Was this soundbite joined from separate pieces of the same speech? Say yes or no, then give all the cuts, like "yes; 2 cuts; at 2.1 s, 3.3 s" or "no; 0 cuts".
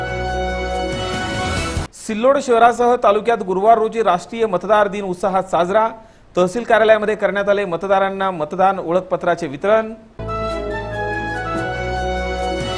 no; 0 cuts